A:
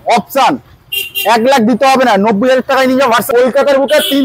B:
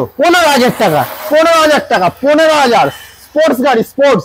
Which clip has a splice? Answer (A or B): A